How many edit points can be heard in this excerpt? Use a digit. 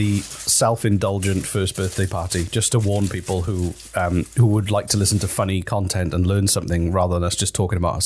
0